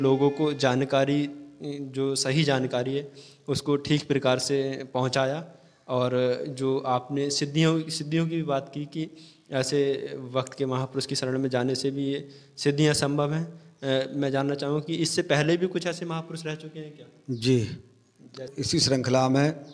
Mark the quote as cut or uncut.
cut